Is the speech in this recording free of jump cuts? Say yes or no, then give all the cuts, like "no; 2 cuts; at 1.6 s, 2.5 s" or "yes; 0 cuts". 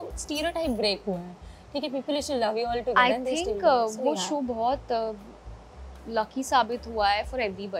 yes; 0 cuts